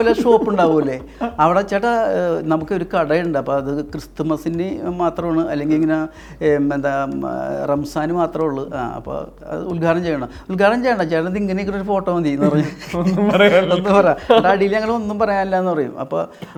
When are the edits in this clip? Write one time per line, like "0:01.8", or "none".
none